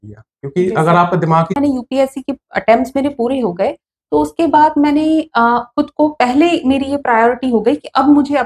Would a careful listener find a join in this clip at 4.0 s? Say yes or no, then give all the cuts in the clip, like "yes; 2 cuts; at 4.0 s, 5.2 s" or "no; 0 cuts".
no; 1 cut; at 1.5 s